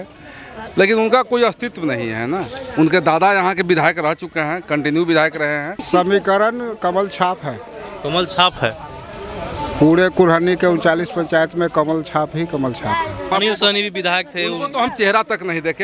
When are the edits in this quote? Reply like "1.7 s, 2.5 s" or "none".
5.8 s, 13.3 s